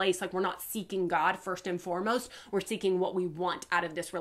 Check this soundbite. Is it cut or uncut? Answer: uncut